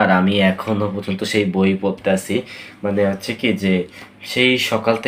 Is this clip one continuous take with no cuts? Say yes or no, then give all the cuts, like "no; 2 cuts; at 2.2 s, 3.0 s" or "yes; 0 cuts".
yes; 0 cuts